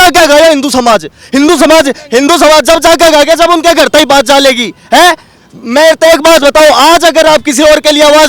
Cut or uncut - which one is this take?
uncut